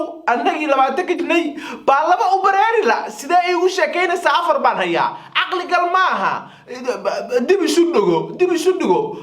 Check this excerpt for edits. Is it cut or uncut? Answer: cut